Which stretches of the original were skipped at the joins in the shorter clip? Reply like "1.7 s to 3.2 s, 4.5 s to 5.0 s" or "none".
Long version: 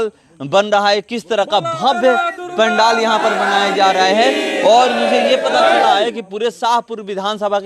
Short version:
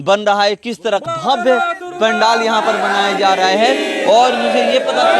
1.5 s to 1.6 s